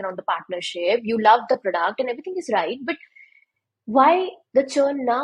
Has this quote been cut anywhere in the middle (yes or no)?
no